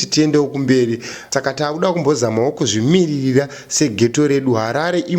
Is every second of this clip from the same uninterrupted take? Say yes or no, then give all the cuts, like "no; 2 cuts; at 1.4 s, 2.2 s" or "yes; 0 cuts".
no; 1 cut; at 1.1 s